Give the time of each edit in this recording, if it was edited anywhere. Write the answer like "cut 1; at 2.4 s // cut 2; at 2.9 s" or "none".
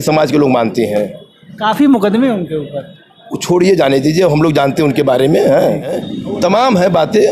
cut 1; at 6.1 s